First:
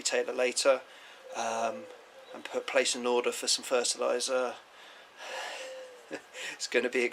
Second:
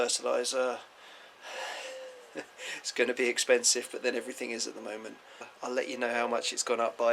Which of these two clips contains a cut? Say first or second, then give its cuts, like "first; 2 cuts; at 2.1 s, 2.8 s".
second; 1 cut; at 5.5 s